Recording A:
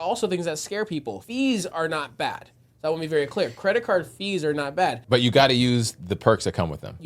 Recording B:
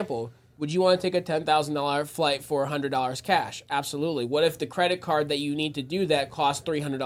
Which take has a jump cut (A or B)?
A